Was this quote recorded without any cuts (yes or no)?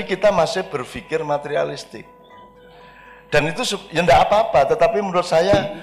yes